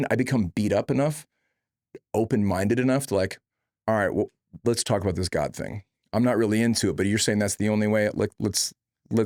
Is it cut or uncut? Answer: uncut